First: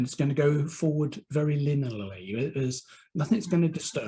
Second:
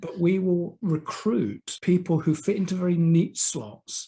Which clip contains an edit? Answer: second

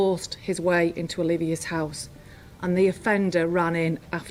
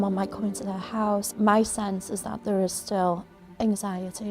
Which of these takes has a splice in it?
second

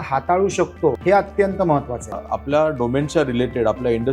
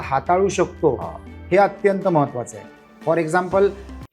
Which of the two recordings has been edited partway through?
first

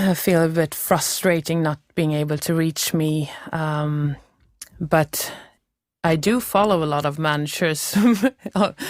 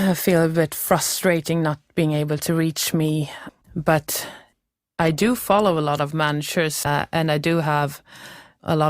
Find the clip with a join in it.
second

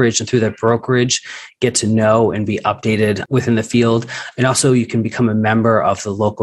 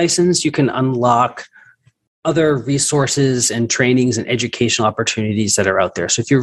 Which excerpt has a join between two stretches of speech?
first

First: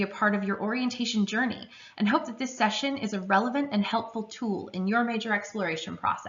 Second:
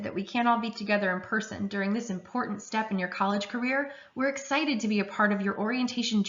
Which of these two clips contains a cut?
second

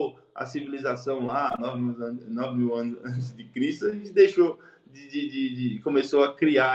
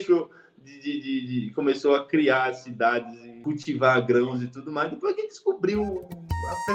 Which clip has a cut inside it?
second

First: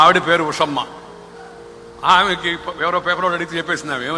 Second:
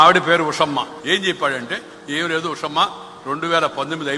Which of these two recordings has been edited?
second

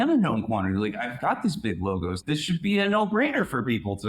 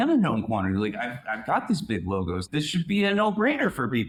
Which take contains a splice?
first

